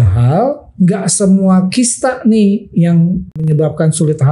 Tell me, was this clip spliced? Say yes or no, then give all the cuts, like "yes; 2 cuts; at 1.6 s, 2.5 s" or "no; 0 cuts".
yes; 1 cut; at 3.4 s